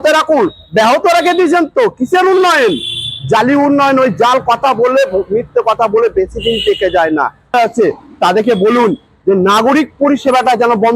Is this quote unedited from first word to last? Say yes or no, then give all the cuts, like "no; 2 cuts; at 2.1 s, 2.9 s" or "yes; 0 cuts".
no; 1 cut; at 7.5 s